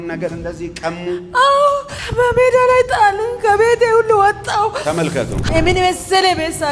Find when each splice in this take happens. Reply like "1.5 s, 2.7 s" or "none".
2.0 s, 5.5 s